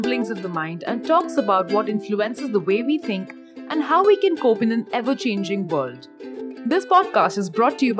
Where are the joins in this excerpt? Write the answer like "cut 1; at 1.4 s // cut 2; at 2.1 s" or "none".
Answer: none